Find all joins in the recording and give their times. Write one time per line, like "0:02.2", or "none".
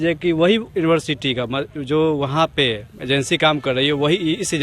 none